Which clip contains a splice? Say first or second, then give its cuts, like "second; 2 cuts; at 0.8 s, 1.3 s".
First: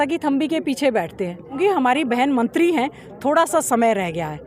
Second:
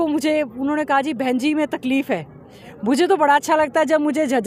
first; 1 cut; at 1.6 s